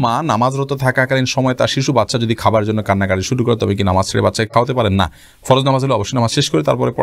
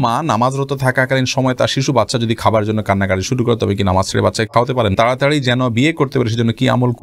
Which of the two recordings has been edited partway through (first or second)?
second